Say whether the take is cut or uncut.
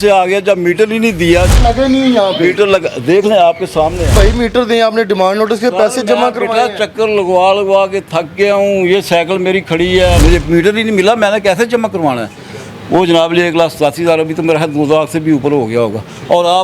cut